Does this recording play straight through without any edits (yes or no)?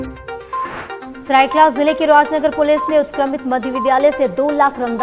yes